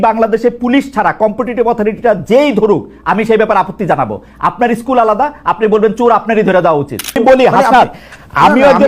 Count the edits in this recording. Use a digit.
1